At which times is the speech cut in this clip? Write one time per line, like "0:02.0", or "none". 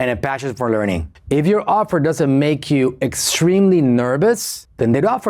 0:01.1